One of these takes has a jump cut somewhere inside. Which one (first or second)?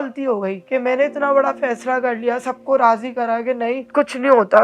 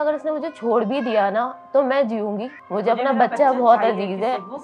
second